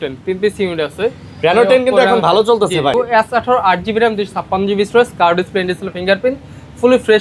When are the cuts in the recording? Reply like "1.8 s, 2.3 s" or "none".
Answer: 2.9 s